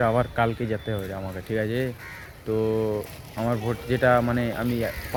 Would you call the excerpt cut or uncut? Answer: uncut